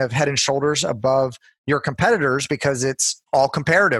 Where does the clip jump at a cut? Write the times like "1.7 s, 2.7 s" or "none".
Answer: 3.1 s